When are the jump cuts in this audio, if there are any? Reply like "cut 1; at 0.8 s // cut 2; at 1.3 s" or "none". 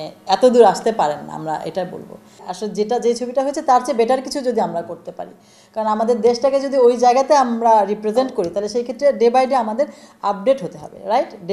cut 1; at 2.5 s

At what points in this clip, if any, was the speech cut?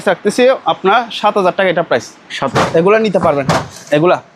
cut 1; at 2.4 s

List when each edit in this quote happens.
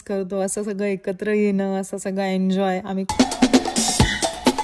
cut 1; at 3.1 s

